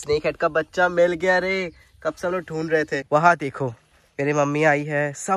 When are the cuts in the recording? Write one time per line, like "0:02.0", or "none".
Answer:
0:03.0